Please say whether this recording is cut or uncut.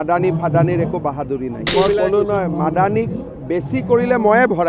cut